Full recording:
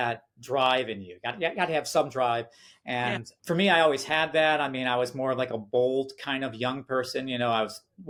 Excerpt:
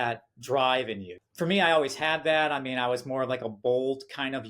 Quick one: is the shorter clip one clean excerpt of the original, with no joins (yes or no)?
no